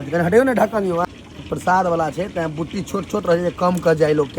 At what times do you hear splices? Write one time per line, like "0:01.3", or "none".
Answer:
0:01.0